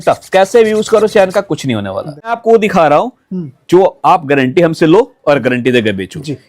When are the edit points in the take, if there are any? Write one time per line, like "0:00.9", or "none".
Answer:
0:02.4